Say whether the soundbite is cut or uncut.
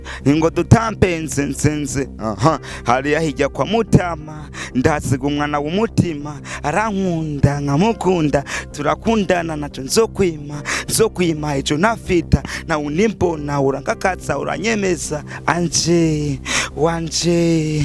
uncut